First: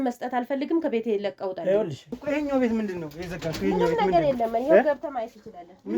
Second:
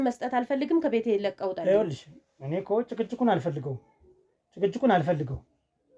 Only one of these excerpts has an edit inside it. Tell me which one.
first; 1 cut; at 2.1 s

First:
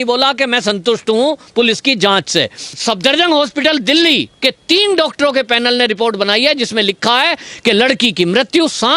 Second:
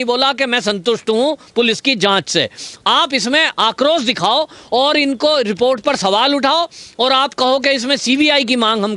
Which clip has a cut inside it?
first; 1 cut; at 2.8 s

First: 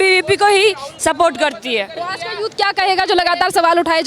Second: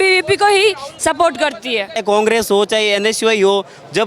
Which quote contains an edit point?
second; 1 cut; at 2.0 s

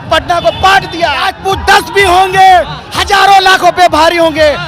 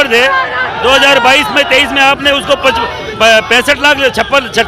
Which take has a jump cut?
first; 1 cut; at 1.3 s

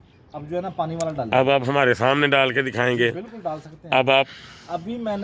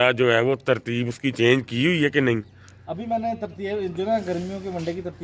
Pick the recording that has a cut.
first; 1 cut; at 4.3 s

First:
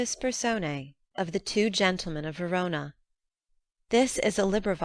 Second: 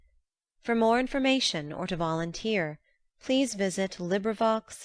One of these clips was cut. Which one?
first; 1 cut; at 1.0 s

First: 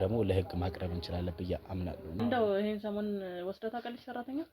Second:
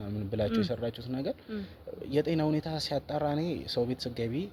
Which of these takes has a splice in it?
first; 1 cut; at 2.2 s

